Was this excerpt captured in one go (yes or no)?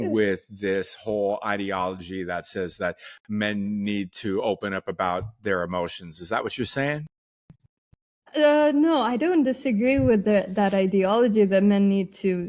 yes